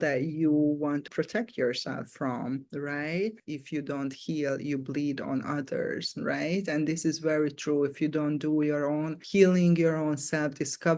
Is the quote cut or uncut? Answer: cut